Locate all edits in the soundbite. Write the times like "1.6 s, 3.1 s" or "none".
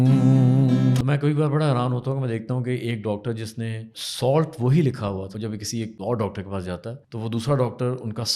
1.0 s, 4.0 s, 5.7 s, 7.0 s

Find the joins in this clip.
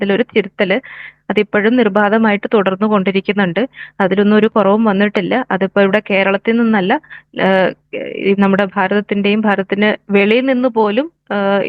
none

